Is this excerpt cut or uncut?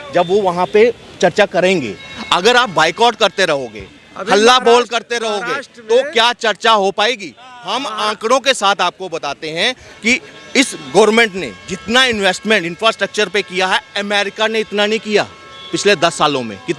uncut